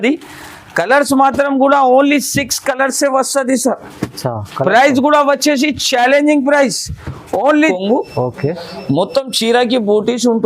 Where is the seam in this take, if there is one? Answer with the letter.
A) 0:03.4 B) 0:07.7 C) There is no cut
B